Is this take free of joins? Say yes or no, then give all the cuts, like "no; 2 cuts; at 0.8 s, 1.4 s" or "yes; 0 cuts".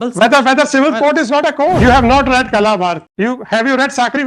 no; 2 cuts; at 1.8 s, 3.1 s